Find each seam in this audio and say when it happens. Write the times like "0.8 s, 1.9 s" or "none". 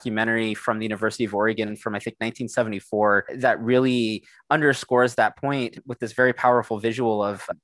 none